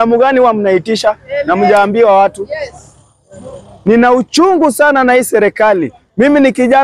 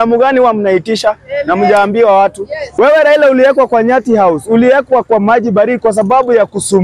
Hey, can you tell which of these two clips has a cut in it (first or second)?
second